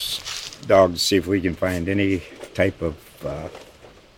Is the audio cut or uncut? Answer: uncut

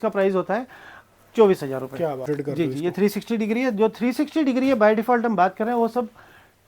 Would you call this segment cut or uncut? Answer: cut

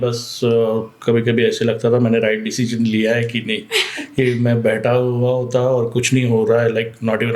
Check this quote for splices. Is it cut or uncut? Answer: uncut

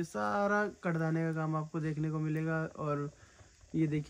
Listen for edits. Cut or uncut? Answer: uncut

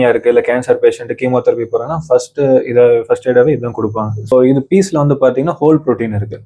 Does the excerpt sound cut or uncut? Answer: cut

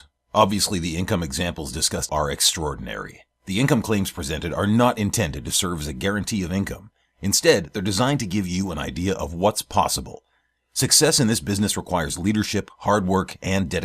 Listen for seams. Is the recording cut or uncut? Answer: cut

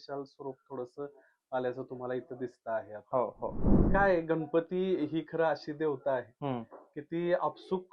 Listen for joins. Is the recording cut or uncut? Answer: cut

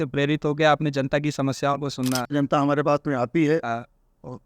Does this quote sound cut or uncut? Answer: cut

